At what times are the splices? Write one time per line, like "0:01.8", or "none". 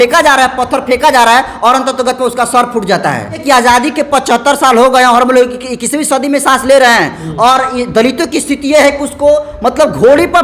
0:03.4